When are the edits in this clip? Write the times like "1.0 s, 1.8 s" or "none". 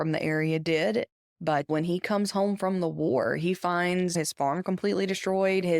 1.5 s